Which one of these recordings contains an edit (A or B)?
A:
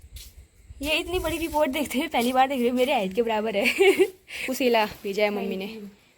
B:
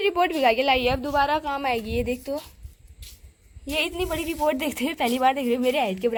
A